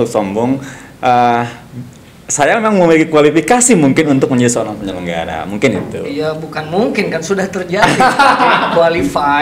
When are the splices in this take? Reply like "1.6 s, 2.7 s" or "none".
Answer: none